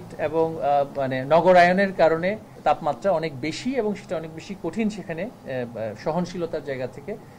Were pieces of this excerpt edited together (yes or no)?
yes